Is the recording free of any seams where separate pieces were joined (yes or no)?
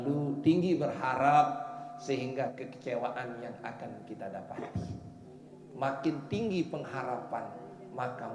no